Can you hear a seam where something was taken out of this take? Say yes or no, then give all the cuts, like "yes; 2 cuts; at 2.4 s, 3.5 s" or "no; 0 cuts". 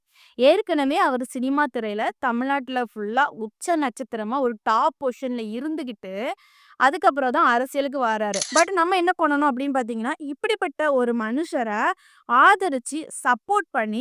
yes; 1 cut; at 8.4 s